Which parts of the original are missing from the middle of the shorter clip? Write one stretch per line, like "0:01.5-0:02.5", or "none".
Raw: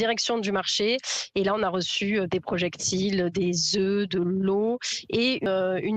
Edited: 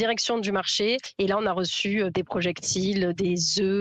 0:01.1-0:01.2

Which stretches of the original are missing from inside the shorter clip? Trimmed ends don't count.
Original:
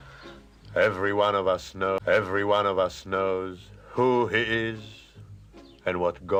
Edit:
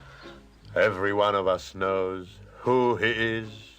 0:01.8-0:03.1

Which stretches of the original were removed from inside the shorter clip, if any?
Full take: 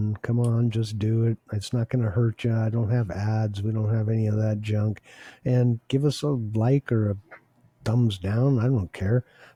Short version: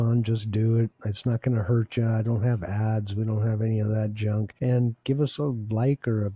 0:05.0-0:05.4

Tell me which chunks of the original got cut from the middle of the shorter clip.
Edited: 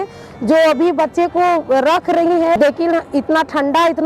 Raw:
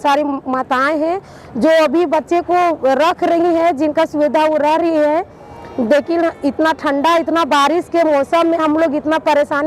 0:03.7-0:05.9

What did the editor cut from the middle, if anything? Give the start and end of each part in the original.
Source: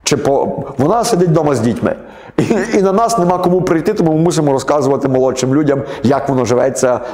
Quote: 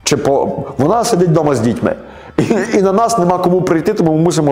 none

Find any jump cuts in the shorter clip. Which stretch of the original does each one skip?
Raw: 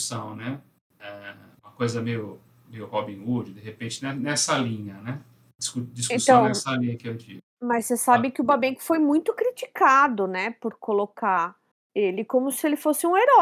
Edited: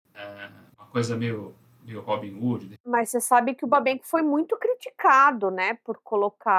0:03.6-0:07.5

